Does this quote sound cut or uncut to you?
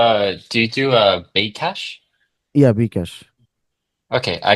uncut